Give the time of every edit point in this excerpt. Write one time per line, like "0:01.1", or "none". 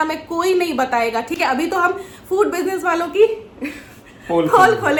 none